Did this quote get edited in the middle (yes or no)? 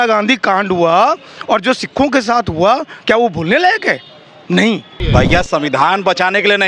yes